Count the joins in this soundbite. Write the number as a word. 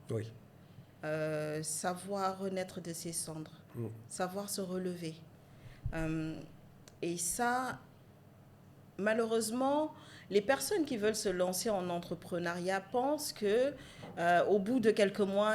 zero